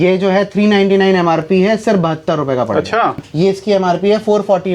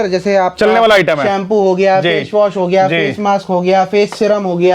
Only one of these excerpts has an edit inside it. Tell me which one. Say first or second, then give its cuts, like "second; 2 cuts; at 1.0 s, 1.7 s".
first; 1 cut; at 3.3 s